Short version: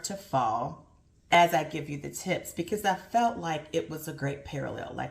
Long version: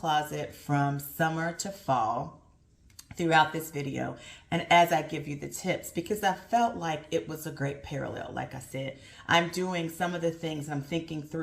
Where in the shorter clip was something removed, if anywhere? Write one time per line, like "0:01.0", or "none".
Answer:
0:01.2